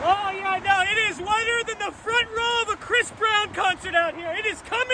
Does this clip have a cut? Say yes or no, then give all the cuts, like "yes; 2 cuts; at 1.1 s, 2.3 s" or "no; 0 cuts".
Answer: no; 0 cuts